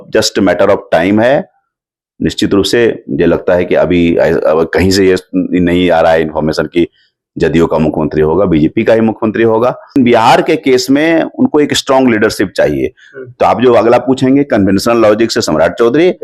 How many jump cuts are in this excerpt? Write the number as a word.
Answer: one